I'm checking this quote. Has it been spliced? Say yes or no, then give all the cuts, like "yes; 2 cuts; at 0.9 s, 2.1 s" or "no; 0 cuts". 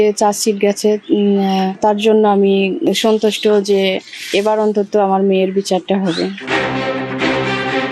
yes; 1 cut; at 6.7 s